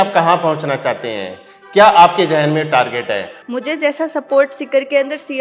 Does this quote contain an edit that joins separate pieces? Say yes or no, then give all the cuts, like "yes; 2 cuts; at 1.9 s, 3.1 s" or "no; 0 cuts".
yes; 1 cut; at 3.4 s